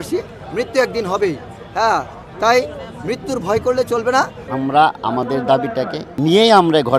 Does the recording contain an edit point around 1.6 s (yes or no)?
no